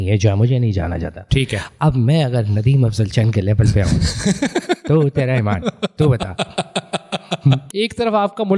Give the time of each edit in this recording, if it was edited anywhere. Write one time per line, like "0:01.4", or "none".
0:07.6

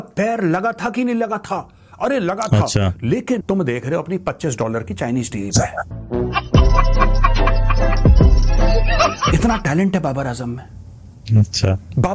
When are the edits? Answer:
0:03.4
0:09.2

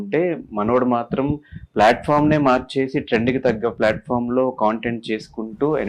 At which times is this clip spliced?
none

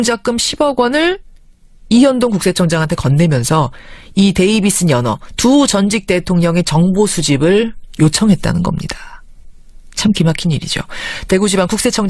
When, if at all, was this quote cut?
0:05.3

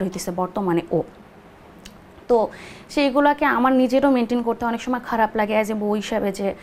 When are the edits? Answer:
none

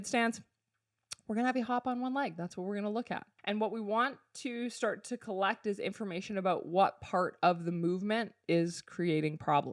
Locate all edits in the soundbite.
0:03.3

